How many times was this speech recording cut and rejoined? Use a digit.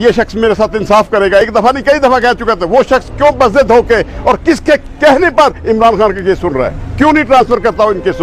0